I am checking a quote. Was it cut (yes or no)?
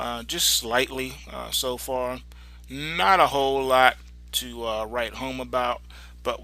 yes